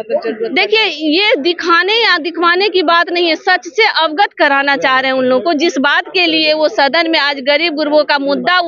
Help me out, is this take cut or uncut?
uncut